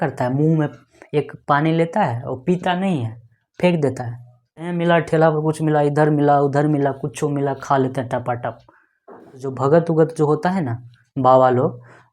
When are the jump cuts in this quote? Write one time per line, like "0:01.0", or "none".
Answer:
0:04.7
0:09.5